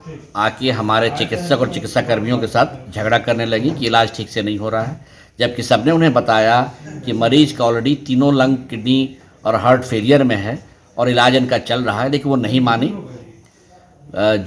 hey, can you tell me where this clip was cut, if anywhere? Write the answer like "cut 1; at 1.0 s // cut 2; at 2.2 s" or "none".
none